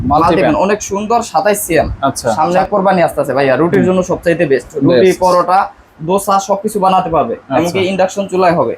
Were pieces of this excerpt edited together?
yes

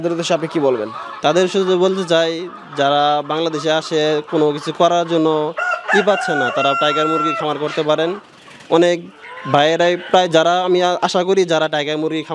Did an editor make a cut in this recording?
no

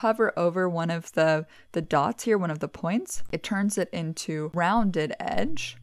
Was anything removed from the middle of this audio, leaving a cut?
yes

